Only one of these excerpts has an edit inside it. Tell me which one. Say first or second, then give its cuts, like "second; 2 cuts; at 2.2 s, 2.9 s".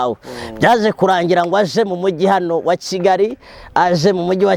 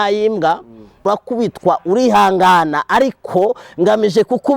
second; 1 cut; at 1.0 s